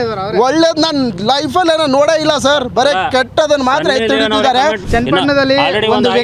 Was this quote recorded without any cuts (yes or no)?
no